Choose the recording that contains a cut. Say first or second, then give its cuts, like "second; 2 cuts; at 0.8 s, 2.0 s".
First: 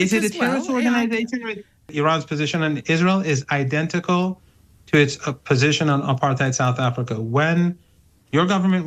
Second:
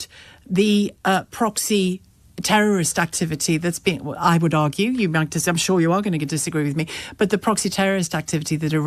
first; 1 cut; at 1.9 s